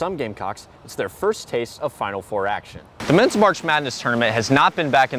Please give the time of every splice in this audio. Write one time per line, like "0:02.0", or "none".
0:03.0